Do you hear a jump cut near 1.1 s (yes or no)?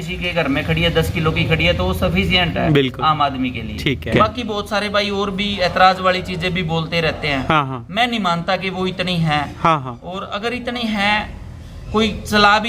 no